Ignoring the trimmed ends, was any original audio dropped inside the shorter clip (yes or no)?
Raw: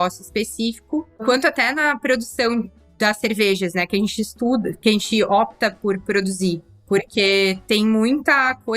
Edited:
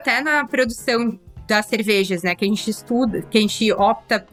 no